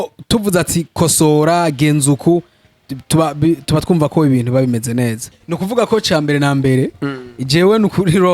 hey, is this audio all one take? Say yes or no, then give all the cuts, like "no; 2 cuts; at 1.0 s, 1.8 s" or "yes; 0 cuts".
no; 1 cut; at 5.2 s